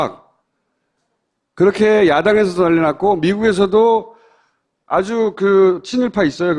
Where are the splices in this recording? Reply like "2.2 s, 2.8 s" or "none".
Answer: 1.4 s